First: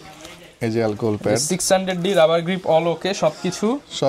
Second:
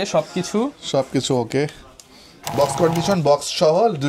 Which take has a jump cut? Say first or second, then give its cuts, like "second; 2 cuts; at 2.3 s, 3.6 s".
second; 1 cut; at 2.5 s